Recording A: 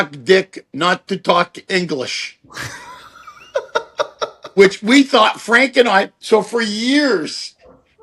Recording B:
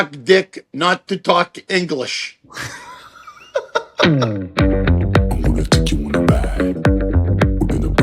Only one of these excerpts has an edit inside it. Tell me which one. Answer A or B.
B